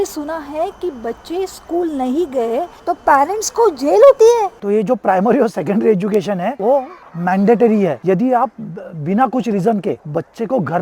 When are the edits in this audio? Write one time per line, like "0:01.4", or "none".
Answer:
0:02.7
0:04.6